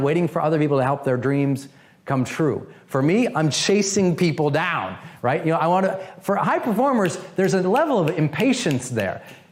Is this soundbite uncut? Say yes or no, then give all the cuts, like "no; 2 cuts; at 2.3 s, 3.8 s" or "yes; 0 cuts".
yes; 0 cuts